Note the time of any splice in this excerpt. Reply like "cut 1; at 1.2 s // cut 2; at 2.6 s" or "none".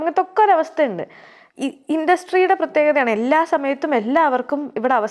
cut 1; at 1.4 s